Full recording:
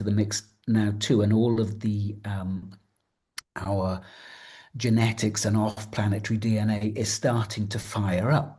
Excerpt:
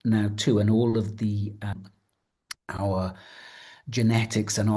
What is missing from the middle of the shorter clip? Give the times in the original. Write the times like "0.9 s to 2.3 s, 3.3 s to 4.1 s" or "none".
2.4 s to 2.6 s

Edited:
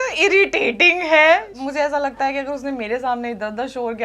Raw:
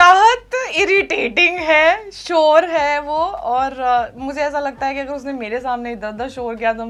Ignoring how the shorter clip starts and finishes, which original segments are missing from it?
2.1 s to 4.2 s

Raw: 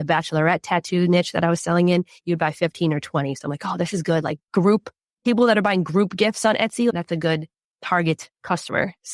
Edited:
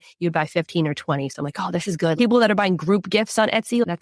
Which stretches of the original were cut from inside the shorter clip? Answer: 4.2 s to 5.2 s

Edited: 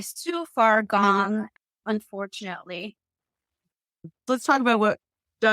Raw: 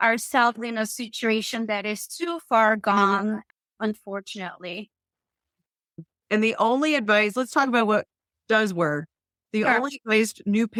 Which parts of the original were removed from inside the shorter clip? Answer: 6.2 s to 7.3 s

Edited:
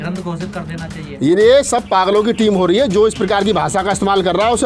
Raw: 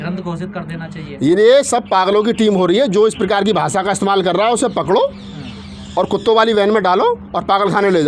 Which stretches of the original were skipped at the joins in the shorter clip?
none

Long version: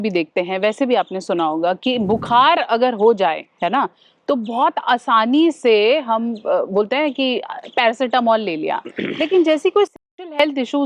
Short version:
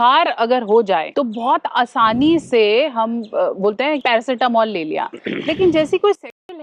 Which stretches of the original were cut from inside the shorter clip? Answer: 3.4 s to 4.2 s, 7.1 s to 7.7 s

